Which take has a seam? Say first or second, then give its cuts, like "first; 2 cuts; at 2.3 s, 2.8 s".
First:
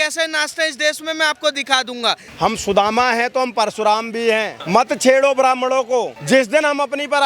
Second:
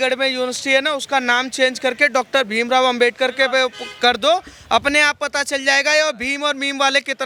first; 3 cuts; at 2.3 s, 4.6 s, 6.2 s